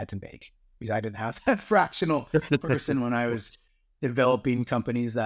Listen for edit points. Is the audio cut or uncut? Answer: uncut